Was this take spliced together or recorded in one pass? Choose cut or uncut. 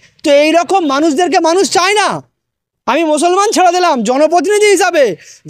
uncut